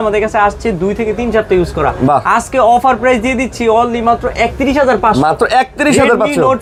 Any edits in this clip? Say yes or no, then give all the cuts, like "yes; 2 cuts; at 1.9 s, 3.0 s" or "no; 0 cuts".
no; 0 cuts